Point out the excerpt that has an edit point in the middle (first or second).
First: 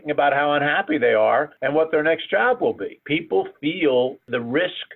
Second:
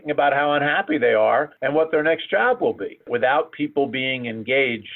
first